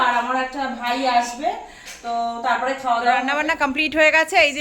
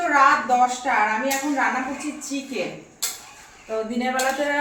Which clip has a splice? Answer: first; 1 cut; at 3.4 s

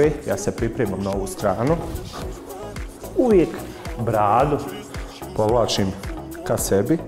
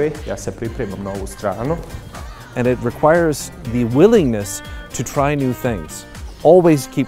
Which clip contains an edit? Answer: second; 1 cut; at 2.4 s

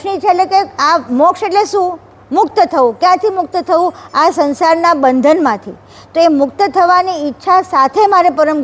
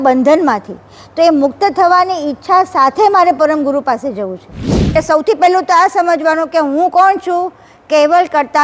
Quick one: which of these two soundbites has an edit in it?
second; 1 cut; at 4.9 s

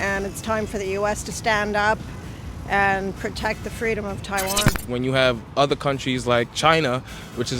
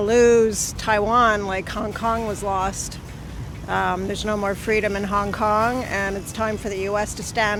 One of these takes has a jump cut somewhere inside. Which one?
first; 1 cut; at 4.8 s

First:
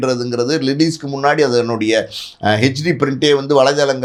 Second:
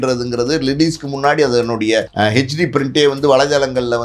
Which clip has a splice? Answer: second; 1 cut; at 2.1 s

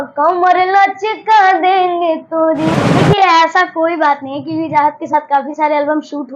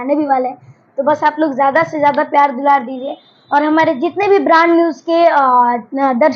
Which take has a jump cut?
first; 1 cut; at 2.8 s

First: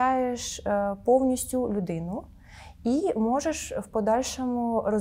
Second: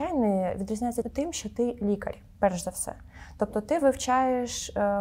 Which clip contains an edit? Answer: second; 1 cut; at 1.1 s

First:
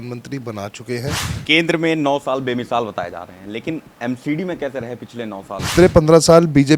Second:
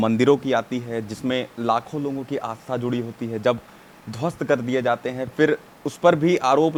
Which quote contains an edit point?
first; 2 cuts; at 1.3 s, 5.7 s

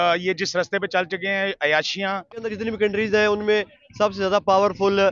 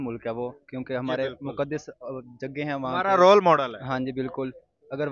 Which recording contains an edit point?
first; 1 cut; at 2.5 s

